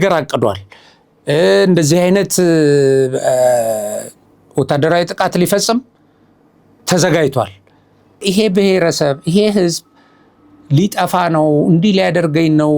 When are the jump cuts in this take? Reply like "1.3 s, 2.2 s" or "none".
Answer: 8.2 s

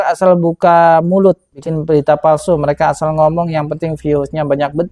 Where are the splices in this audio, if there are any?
1.6 s

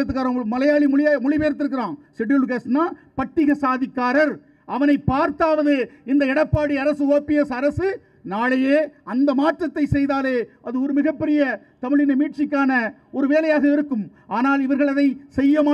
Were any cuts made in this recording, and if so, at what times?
none

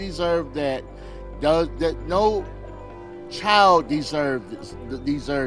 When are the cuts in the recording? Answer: none

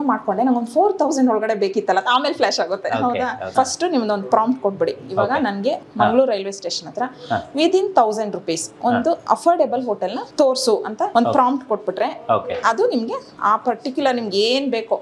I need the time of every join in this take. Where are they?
3.5 s, 5.8 s, 9.2 s, 10.2 s, 11.1 s

